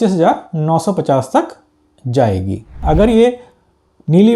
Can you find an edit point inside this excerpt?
yes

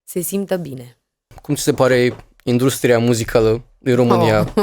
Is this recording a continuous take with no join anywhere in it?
no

